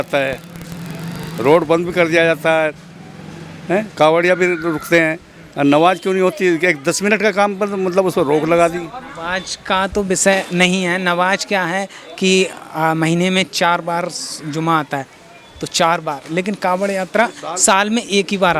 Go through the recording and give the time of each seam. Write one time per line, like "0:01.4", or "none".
none